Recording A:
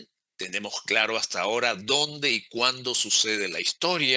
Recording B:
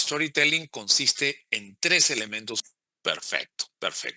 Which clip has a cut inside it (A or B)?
B